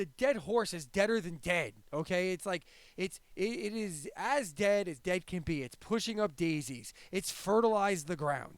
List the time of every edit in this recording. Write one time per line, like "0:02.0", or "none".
none